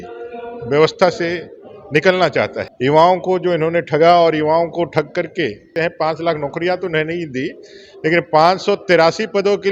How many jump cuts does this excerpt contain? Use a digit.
1